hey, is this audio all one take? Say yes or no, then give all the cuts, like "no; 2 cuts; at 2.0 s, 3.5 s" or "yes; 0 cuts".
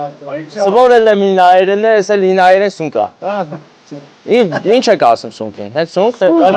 yes; 0 cuts